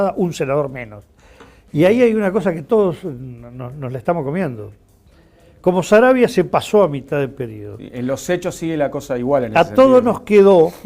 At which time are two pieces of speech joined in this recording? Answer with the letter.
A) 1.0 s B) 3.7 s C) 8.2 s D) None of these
A